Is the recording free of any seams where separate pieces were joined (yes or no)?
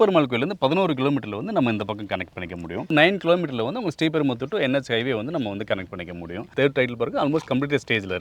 no